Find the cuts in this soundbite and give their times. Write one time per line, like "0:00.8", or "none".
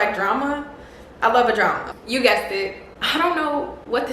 0:01.8